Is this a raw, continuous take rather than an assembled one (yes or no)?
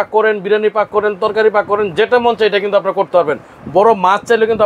yes